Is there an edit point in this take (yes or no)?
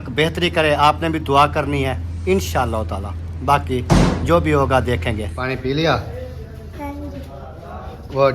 yes